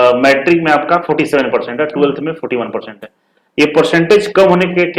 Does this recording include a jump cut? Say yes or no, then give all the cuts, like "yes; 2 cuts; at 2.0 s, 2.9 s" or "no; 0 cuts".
no; 0 cuts